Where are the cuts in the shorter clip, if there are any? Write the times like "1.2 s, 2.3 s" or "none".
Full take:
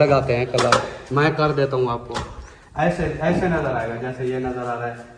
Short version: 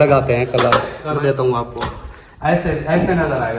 1.1 s